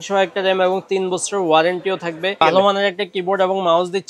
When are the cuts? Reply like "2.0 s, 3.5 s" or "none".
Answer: 2.4 s